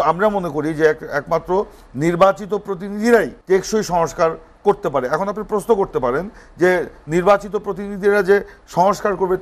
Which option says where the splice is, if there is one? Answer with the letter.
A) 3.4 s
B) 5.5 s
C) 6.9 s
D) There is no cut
A